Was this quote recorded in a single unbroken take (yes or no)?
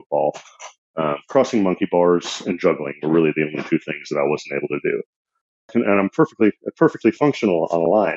no